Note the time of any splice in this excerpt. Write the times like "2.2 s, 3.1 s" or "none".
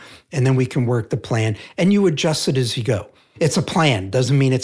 3.3 s